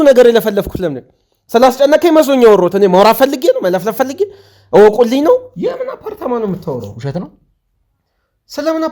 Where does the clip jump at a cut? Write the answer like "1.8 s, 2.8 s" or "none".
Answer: 5.5 s